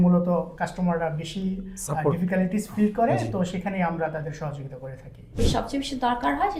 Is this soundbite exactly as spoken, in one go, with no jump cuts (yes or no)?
no